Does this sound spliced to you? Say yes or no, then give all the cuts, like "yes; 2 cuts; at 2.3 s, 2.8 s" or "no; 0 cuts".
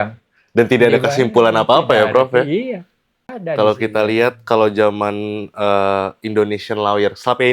yes; 1 cut; at 3.4 s